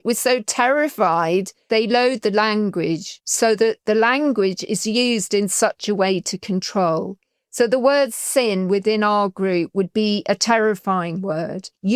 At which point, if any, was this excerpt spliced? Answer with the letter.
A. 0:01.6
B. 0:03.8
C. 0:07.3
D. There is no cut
A